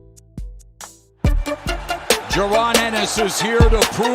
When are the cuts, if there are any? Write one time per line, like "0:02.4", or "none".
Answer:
0:01.0

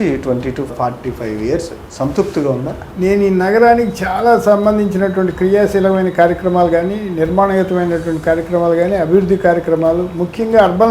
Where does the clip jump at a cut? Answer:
0:01.8
0:02.8

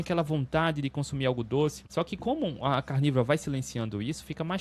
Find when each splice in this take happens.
0:01.8

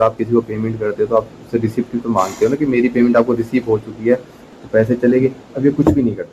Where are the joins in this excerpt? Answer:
0:04.4

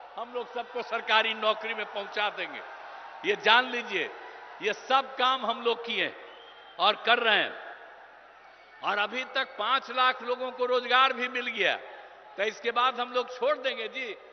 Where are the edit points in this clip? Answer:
none

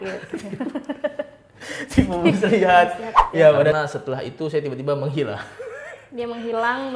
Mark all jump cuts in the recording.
0:03.7

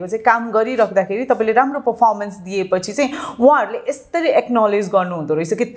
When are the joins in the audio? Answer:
none

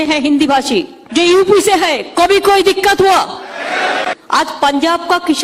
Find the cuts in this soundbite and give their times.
0:01.0
0:04.2

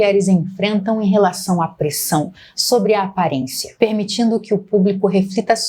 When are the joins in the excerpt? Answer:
0:03.6

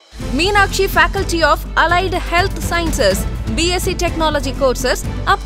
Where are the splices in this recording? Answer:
none

